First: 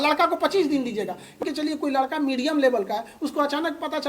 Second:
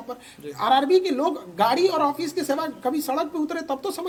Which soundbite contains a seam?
first; 1 cut; at 1.4 s

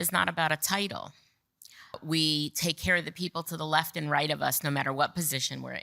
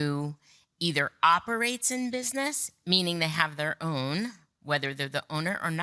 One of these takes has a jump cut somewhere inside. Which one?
first; 1 cut; at 2.0 s

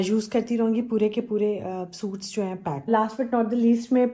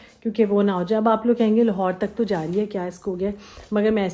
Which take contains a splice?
first; 1 cut; at 2.9 s

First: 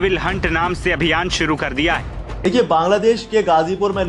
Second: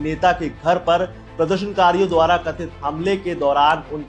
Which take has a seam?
first; 1 cut; at 2.4 s

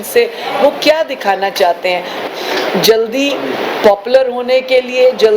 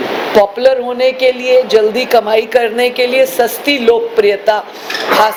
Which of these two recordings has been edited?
first; 1 cut; at 2.3 s

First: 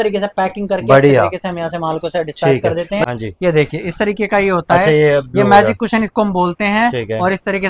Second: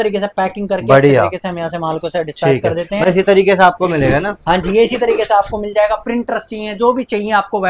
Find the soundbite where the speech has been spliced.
first; 1 cut; at 3.0 s

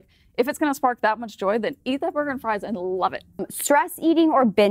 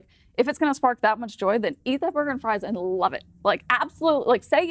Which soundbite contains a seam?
first; 1 cut; at 3.4 s

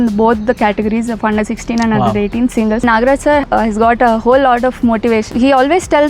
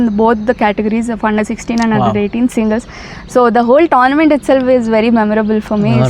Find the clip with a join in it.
first; 2 cuts; at 3.3 s, 5.3 s

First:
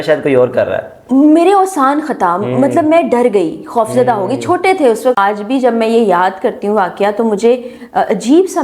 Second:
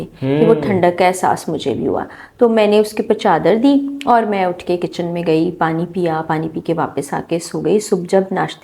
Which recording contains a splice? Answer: first; 1 cut; at 5.2 s

